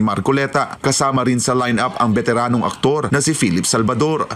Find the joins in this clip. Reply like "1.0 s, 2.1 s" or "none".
2.3 s